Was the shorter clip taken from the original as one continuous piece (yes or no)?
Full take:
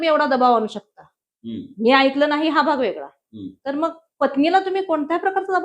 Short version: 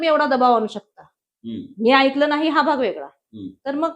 yes